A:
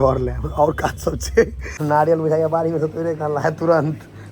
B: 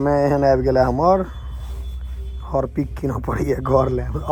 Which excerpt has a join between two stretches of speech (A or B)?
A